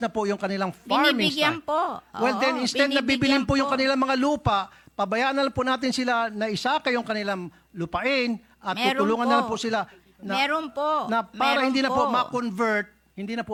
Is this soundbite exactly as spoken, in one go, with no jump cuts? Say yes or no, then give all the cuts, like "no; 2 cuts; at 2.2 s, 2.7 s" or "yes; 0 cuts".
yes; 0 cuts